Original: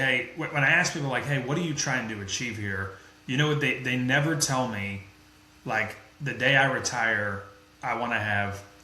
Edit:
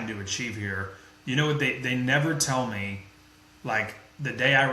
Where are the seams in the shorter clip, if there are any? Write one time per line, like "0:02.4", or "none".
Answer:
none